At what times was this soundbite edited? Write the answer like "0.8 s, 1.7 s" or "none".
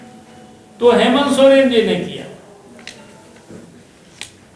none